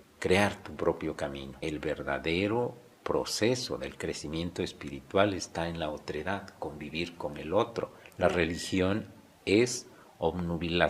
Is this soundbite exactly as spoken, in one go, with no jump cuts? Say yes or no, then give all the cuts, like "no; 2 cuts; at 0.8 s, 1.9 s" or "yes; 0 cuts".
no; 2 cuts; at 1.5 s, 8.0 s